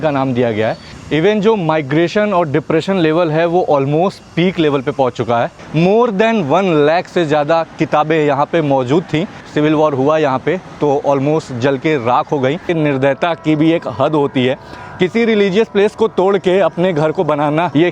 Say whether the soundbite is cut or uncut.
cut